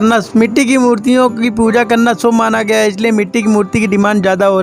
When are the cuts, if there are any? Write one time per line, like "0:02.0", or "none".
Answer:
none